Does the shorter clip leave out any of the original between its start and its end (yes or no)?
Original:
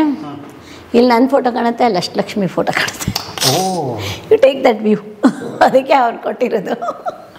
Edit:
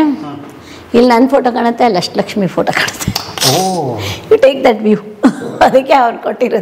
no